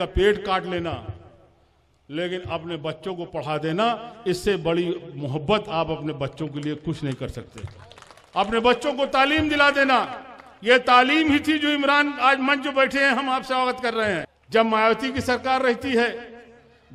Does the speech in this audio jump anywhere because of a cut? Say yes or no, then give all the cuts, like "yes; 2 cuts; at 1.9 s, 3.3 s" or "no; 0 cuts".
yes; 1 cut; at 14.3 s